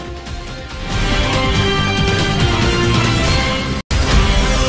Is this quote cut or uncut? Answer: uncut